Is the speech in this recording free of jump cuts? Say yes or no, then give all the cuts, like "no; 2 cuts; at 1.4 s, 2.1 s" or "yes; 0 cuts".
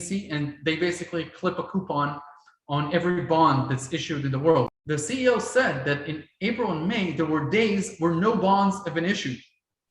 no; 1 cut; at 4.7 s